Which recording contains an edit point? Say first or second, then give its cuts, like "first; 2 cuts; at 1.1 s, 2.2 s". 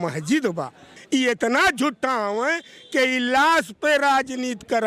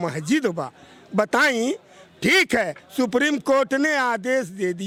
first; 1 cut; at 0.9 s